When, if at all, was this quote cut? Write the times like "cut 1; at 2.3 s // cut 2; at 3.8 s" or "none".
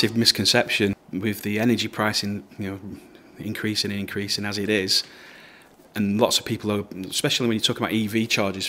cut 1; at 0.9 s